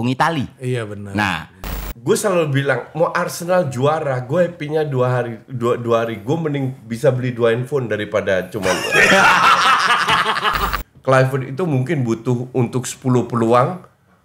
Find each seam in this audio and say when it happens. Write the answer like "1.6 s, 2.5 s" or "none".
1.8 s, 10.7 s